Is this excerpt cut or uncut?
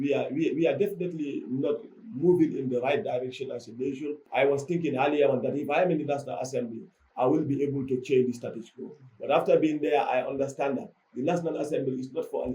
cut